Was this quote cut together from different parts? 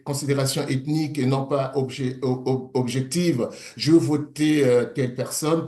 no; 0 cuts

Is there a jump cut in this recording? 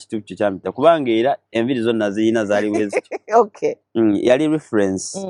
no; 0 cuts

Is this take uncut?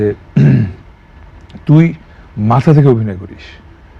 yes; 0 cuts

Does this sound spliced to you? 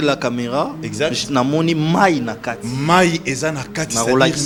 no; 0 cuts

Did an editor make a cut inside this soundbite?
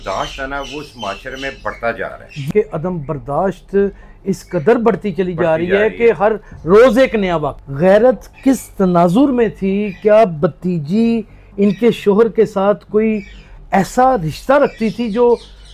yes; 2 cuts; at 2.5 s, 7.6 s

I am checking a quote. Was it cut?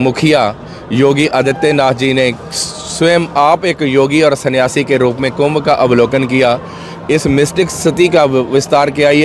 no; 0 cuts

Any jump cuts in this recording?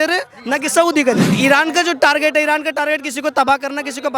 yes; 1 cut; at 1.3 s

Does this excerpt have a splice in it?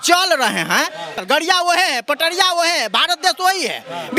yes; 1 cut; at 1.2 s

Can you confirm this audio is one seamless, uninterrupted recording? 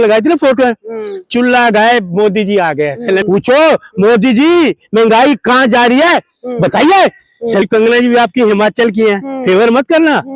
no; 2 cuts; at 3.2 s, 7.6 s

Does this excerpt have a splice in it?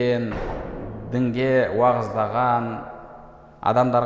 no; 0 cuts

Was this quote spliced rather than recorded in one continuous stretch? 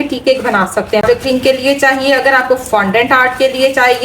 yes; 1 cut; at 1.0 s

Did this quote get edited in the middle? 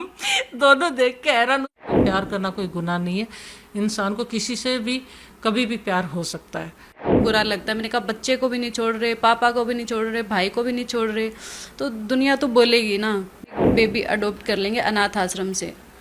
yes; 3 cuts; at 1.9 s, 7.2 s, 13.5 s

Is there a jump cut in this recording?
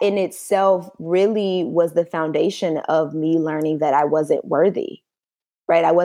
no; 0 cuts

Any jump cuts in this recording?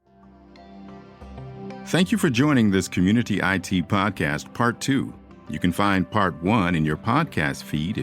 yes; 1 cut; at 1.1 s

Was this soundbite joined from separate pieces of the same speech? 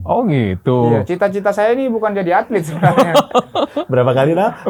no; 0 cuts

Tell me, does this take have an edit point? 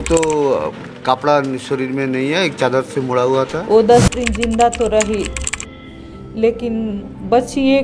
yes; 1 cut; at 3.6 s

